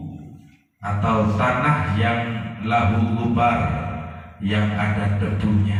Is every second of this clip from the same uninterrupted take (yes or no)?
yes